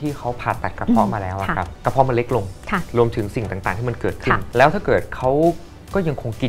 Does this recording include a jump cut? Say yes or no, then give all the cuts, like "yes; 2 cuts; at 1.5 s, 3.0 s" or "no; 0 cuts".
yes; 2 cuts; at 1.7 s, 4.4 s